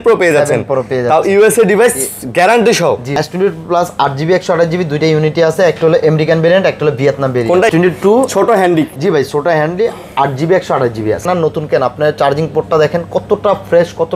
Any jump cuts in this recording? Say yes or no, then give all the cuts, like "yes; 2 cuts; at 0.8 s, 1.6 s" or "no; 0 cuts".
yes; 3 cuts; at 3.1 s, 7.7 s, 11.3 s